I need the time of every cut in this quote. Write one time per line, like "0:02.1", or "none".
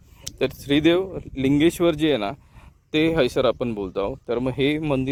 none